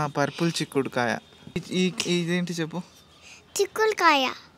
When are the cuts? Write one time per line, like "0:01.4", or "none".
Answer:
0:01.6